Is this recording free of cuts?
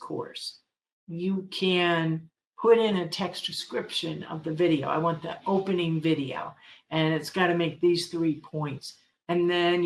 yes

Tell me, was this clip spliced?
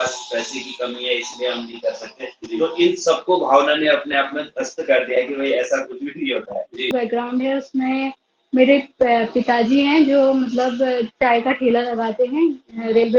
yes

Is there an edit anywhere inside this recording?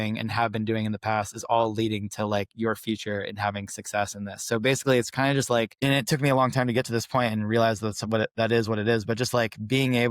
yes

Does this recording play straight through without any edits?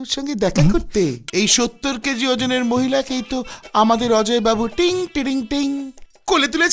no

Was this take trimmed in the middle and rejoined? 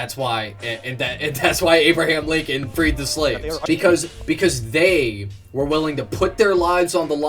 yes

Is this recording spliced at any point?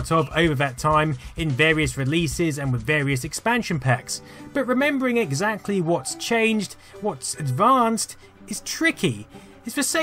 yes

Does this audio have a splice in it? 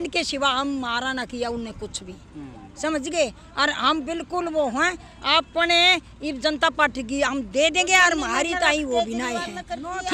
no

